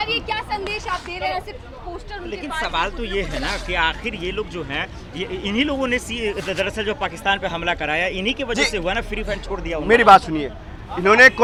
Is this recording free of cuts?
yes; 0 cuts

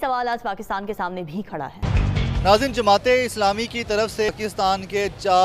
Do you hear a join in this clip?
yes; 2 cuts; at 1.8 s, 4.3 s

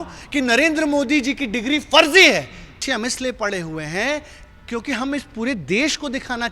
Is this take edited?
yes; 1 cut; at 2.8 s

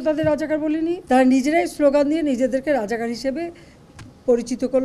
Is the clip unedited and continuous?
no; 1 cut; at 1.0 s

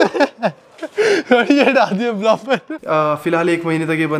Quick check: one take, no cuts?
no; 1 cut; at 2.7 s

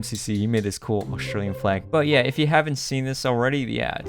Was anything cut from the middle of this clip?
yes; 1 cut; at 1.8 s

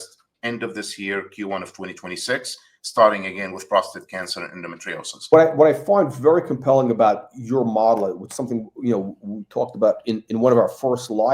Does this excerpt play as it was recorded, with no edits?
no; 1 cut; at 5.3 s

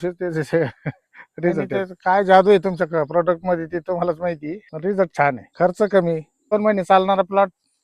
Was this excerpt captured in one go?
no; 4 cuts; at 1.7 s, 4.7 s, 5.5 s, 6.5 s

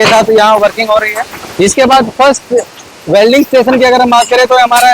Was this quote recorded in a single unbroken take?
no; 1 cut; at 1.4 s

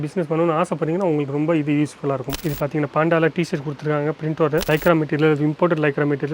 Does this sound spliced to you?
yes; 2 cuts; at 2.4 s, 4.6 s

